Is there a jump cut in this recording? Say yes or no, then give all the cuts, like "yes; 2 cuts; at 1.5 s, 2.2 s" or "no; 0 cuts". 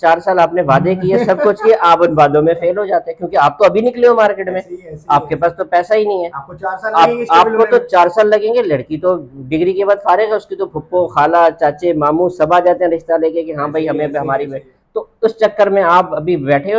no; 0 cuts